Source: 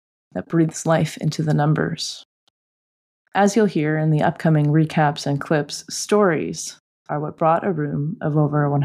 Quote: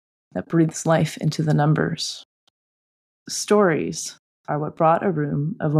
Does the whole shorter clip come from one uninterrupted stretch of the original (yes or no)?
no